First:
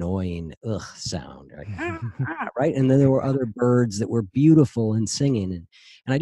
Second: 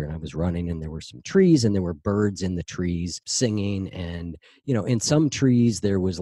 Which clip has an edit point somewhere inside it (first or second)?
second